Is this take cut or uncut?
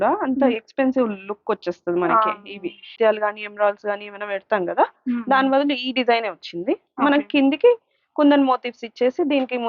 cut